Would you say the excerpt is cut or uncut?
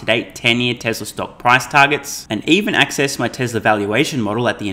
uncut